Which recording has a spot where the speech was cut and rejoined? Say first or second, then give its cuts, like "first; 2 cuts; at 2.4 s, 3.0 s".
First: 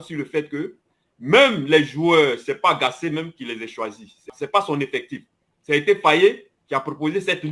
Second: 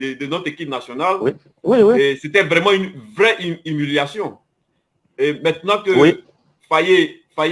first; 1 cut; at 4.3 s